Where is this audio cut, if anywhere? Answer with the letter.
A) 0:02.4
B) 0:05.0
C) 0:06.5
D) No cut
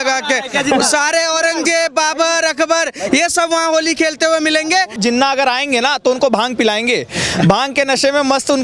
B